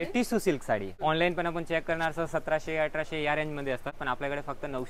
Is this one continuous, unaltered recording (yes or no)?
no